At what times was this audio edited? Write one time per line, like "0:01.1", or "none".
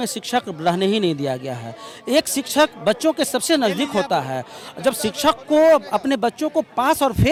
none